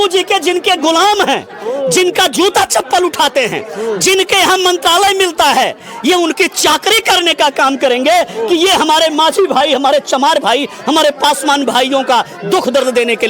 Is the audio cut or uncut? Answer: uncut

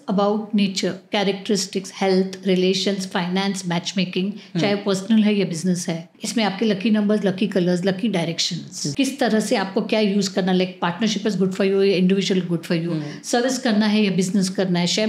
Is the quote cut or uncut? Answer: cut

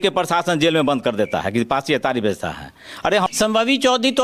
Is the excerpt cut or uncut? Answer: cut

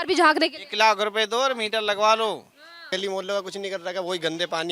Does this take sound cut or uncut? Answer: cut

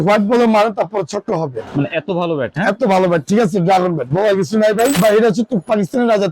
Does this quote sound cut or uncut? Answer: cut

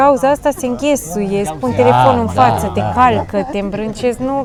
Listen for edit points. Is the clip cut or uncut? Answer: uncut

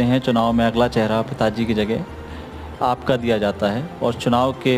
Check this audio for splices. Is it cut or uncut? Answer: uncut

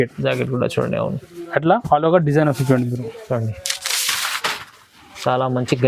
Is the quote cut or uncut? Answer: uncut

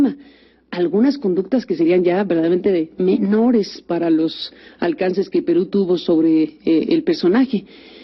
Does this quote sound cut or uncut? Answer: uncut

